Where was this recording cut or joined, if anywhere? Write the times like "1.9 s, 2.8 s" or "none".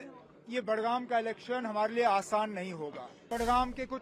3.1 s